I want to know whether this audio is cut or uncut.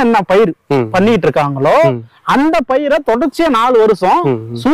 uncut